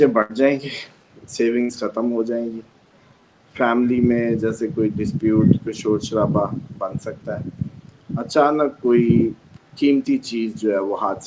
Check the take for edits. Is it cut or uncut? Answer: uncut